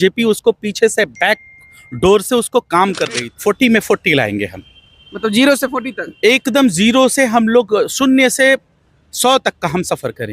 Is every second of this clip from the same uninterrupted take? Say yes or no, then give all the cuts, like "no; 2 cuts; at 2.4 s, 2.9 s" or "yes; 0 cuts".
no; 1 cut; at 3.3 s